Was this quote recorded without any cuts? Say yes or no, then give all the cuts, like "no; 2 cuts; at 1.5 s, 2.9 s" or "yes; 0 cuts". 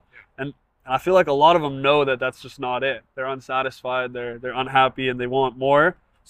yes; 0 cuts